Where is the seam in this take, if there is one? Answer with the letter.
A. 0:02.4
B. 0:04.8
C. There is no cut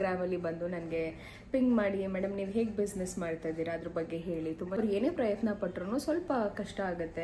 B